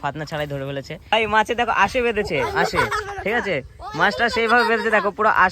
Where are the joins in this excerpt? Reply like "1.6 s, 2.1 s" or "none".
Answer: 1.1 s